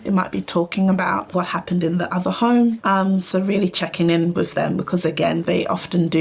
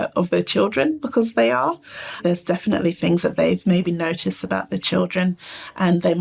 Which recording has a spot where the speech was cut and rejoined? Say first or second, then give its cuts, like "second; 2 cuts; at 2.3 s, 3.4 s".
first; 2 cuts; at 1.3 s, 5.4 s